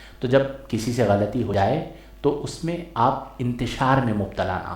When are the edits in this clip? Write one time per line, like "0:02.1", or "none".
0:01.5